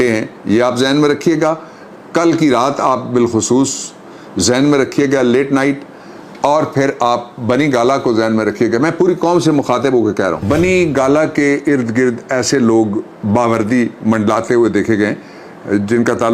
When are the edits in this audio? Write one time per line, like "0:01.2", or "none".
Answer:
0:10.4

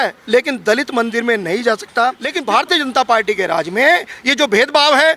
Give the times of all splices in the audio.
0:02.3

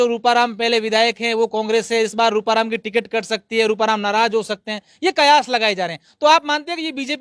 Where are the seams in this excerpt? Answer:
none

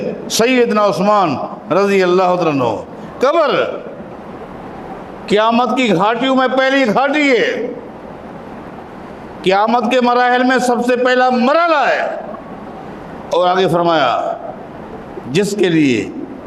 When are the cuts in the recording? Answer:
none

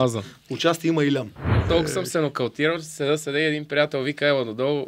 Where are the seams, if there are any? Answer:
0:01.6

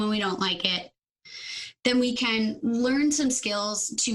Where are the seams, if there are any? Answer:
none

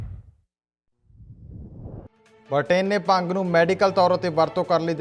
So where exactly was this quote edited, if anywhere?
0:02.1

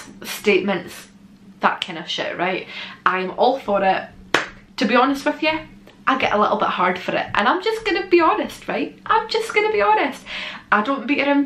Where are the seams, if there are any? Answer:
none

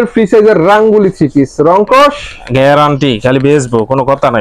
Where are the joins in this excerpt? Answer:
none

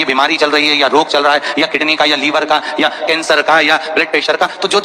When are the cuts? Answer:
none

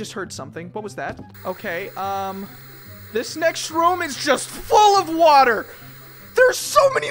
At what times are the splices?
none

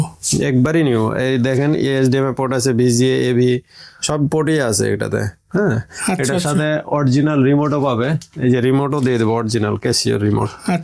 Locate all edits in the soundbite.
none

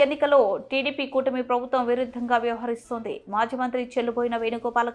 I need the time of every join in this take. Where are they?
none

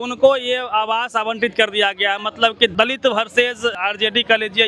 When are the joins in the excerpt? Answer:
0:02.7
0:03.7

